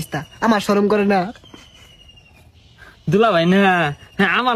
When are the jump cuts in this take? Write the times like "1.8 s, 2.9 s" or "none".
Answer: none